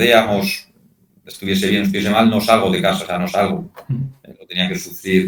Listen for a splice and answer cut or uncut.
uncut